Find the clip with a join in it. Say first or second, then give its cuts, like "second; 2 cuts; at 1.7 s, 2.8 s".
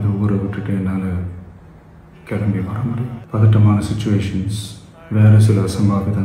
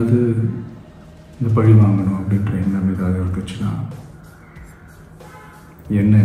first; 1 cut; at 3.2 s